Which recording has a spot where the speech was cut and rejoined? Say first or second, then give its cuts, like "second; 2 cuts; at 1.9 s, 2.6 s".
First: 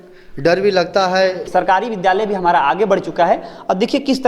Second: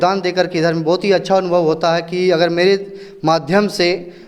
first; 1 cut; at 1.4 s